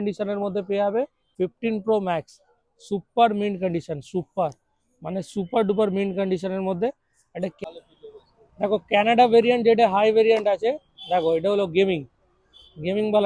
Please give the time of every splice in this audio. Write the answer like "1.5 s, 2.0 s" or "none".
1.3 s, 7.6 s